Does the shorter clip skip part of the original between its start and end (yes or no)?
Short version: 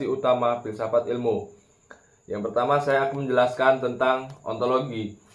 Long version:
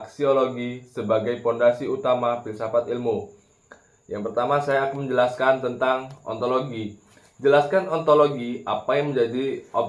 no